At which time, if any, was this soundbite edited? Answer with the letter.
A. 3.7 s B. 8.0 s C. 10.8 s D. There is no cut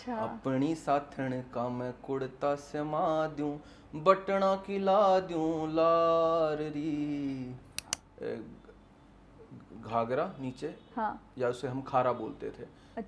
B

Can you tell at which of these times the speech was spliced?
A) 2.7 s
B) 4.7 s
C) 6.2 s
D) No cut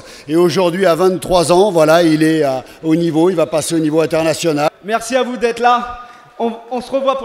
B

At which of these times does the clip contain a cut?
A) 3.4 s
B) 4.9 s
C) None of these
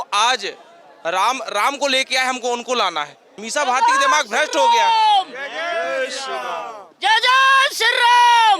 A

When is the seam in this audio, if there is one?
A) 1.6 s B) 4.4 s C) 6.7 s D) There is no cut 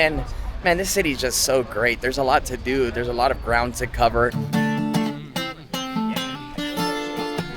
B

